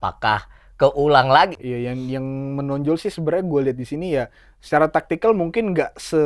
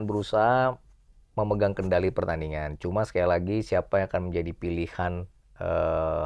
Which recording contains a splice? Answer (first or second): first